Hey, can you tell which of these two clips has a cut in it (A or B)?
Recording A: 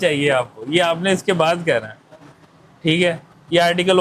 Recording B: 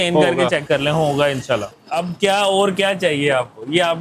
B